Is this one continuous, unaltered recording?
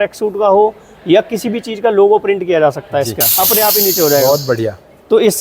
no; 1 cut; at 3.2 s

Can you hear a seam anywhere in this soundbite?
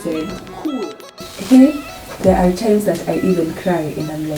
yes; 1 cut; at 1.3 s

